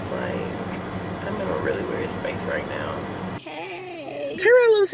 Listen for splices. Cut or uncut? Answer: cut